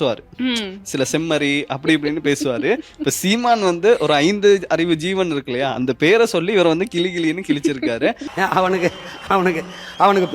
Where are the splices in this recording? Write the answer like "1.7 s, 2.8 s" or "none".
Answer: none